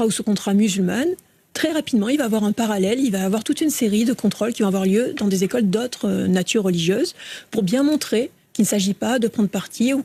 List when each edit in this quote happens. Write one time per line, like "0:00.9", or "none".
none